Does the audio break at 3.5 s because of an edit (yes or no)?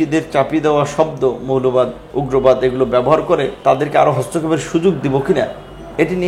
yes